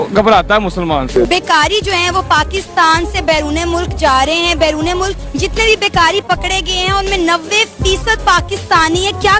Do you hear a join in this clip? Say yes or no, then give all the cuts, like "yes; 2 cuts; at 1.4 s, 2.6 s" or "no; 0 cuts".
no; 0 cuts